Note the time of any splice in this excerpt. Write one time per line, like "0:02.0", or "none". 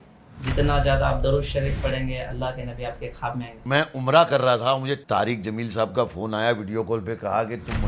0:03.6